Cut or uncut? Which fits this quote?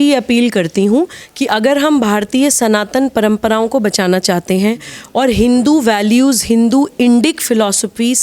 uncut